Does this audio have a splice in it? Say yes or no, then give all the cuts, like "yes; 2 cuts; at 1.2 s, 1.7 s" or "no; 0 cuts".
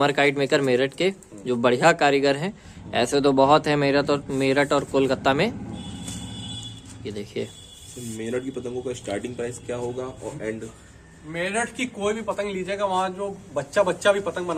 no; 0 cuts